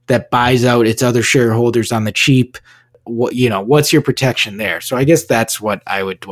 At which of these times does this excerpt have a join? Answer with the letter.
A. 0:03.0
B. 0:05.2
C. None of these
A